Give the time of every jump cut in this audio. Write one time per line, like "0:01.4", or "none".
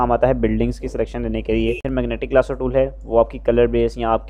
0:01.8